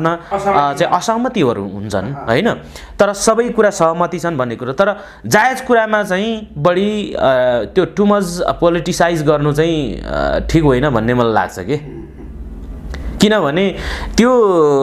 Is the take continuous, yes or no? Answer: yes